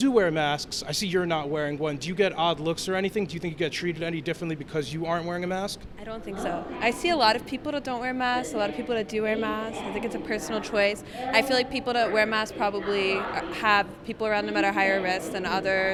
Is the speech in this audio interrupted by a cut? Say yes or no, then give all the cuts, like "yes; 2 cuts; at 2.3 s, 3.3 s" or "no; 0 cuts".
no; 0 cuts